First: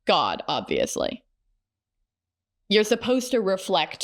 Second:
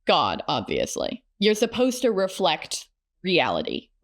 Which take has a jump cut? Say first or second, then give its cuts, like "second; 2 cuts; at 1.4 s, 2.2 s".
second; 1 cut; at 1.2 s